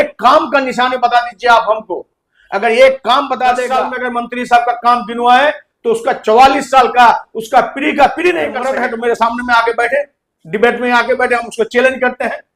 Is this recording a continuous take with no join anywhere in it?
no; 2 cuts; at 3.7 s, 8.6 s

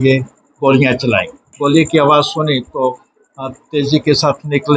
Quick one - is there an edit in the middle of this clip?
yes; 1 cut; at 1.4 s

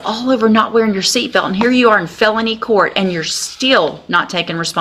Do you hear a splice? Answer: no; 0 cuts

